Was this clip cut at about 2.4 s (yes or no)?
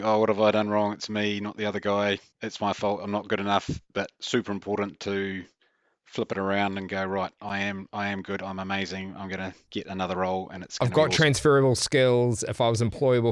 yes